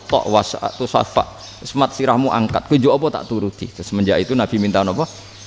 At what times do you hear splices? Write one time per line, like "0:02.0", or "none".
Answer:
none